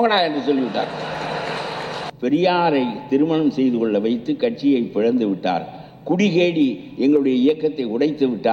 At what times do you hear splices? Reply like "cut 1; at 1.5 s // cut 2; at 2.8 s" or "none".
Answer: cut 1; at 2.0 s